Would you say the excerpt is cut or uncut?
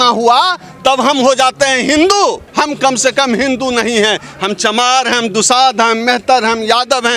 cut